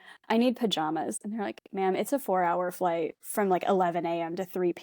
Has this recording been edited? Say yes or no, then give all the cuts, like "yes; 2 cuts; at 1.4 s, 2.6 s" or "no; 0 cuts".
yes; 1 cut; at 3.2 s